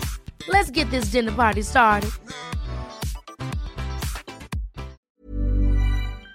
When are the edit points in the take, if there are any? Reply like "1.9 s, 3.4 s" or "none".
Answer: 5.0 s